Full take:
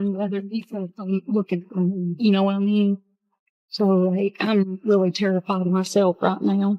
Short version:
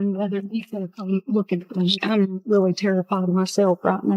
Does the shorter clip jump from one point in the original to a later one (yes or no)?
yes